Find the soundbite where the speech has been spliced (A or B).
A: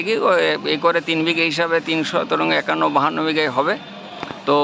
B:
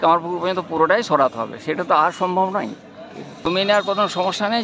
B